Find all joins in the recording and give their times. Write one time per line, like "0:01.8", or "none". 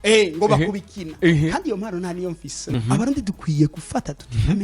0:02.6